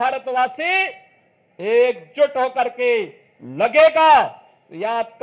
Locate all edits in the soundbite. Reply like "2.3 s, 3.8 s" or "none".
none